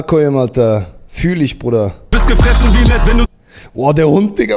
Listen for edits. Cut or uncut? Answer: cut